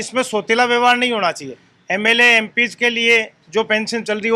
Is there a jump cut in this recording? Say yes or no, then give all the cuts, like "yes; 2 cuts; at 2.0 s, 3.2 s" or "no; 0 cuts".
no; 0 cuts